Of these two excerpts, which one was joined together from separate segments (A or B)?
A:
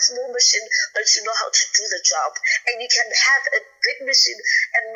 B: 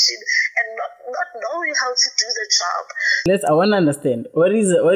B